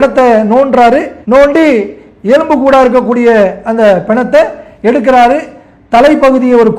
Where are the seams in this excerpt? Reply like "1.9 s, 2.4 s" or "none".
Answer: 1.1 s